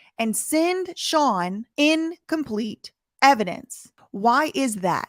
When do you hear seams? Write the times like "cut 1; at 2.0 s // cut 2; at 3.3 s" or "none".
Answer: cut 1; at 1.6 s